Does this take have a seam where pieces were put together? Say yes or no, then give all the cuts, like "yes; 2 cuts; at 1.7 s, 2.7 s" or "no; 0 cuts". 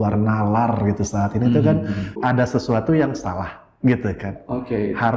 yes; 1 cut; at 2.2 s